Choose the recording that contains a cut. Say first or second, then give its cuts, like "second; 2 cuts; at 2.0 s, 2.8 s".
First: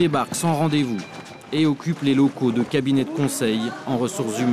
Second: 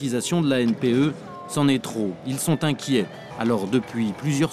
second; 1 cut; at 3.2 s